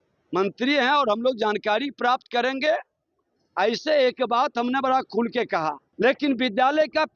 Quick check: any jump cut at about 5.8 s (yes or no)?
yes